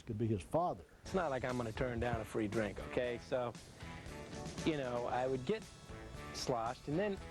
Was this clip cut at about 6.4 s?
no; 1 cut; at 1.1 s

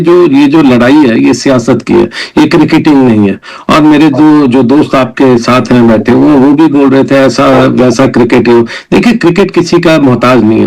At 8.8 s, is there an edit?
no; 0 cuts

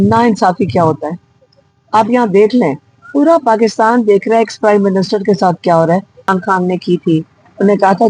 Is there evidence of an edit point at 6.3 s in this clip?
yes; 1 cut; at 6.3 s

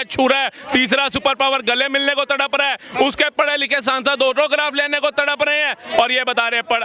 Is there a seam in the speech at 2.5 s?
no; 0 cuts

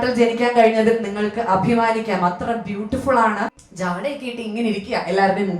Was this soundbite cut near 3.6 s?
yes; 1 cut; at 3.6 s

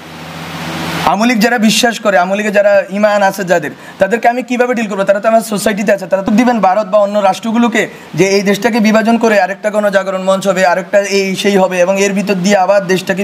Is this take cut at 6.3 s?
yes; 1 cut; at 6.3 s

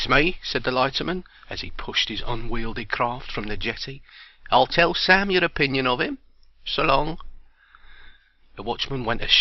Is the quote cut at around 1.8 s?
no; 1 cut; at 7.1 s

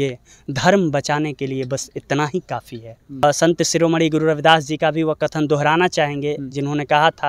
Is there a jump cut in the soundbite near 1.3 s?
no; 1 cut; at 3.2 s

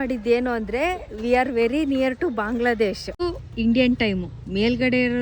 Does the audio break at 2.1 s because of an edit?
no; 1 cut; at 3.3 s

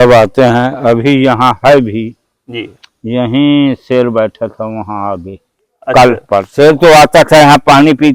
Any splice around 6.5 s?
yes; 1 cut; at 6.5 s

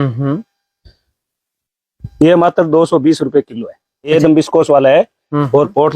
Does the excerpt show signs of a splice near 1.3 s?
no; 1 cut; at 4.1 s

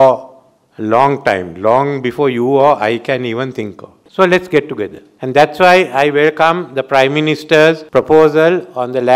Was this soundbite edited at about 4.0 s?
yes; 1 cut; at 4.0 s

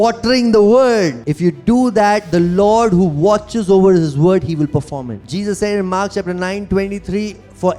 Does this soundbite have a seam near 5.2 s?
yes; 2 cuts; at 1.1 s, 5.2 s

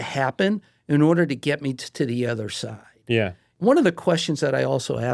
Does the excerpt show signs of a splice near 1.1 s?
no; 1 cut; at 3.4 s

